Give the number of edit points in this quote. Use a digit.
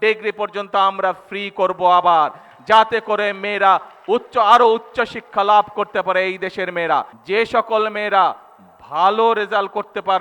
1